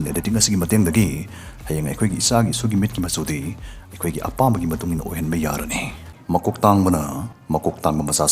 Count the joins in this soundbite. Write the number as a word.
two